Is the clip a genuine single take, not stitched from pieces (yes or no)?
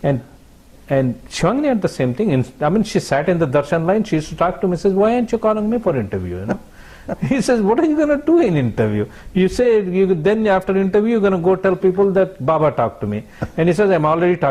yes